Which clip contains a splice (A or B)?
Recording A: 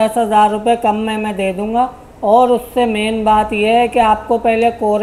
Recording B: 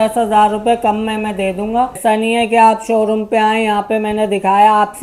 B